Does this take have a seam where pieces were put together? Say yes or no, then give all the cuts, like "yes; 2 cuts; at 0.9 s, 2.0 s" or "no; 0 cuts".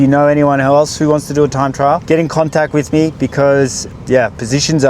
yes; 2 cuts; at 2.0 s, 3.8 s